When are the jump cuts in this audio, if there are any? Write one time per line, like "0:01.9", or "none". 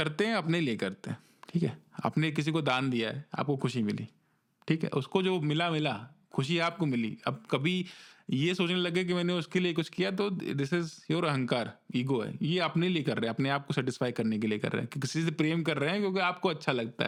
none